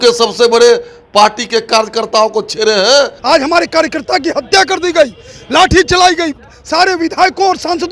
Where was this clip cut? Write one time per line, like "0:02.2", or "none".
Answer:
0:03.2